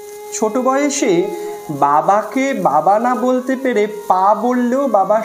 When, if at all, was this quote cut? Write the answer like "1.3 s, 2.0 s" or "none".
none